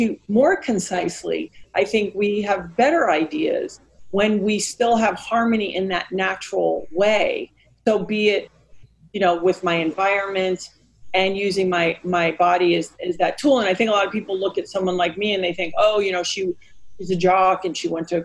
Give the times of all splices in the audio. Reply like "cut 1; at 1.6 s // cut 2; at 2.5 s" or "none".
none